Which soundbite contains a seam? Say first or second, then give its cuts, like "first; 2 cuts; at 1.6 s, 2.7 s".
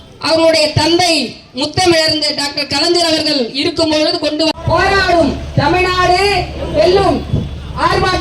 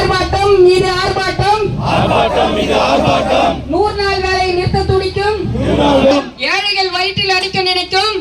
first; 1 cut; at 4.6 s